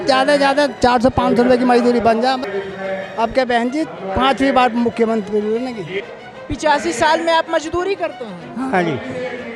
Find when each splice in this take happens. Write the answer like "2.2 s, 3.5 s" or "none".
2.4 s, 6.0 s